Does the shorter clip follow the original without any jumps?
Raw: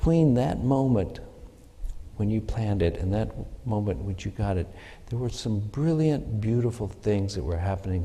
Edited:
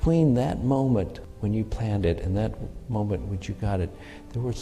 no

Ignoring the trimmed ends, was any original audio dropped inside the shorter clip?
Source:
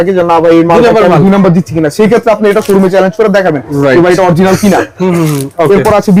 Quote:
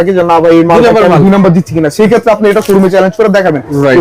no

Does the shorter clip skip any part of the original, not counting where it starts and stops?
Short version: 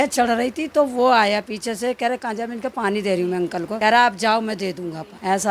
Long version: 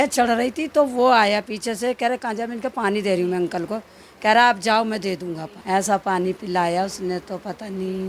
yes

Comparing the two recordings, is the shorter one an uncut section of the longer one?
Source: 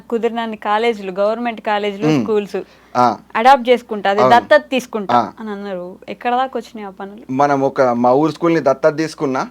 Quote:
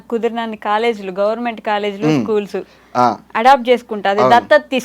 yes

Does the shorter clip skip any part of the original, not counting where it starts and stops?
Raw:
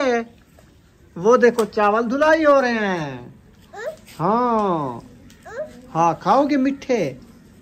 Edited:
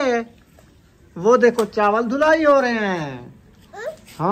no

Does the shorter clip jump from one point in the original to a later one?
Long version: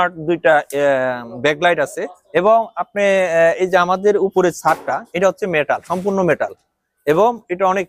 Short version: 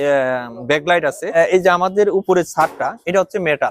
yes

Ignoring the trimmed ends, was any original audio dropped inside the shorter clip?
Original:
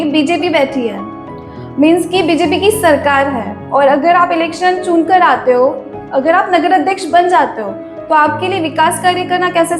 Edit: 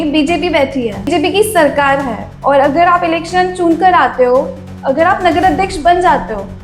yes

